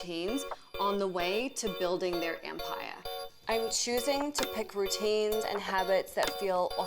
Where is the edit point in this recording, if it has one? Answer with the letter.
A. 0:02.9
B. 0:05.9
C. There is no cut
A